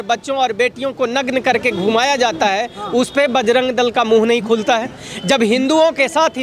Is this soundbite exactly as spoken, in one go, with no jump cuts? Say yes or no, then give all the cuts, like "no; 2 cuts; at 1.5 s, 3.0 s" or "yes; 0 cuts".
yes; 0 cuts